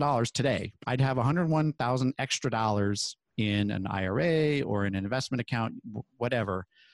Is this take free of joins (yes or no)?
yes